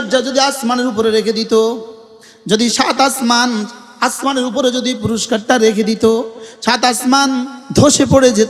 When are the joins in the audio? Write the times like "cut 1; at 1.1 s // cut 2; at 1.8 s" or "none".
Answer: cut 1; at 7.6 s